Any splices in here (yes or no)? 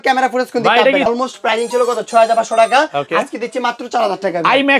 yes